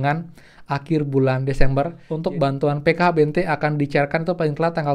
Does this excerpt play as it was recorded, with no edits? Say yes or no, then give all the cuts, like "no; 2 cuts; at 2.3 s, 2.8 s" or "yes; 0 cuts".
no; 1 cut; at 2.0 s